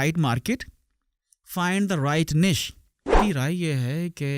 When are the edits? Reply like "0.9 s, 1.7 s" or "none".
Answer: 3.2 s